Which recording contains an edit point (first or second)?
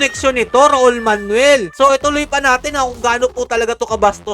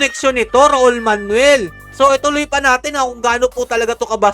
first